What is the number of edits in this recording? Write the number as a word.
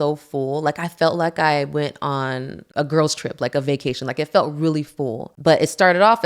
two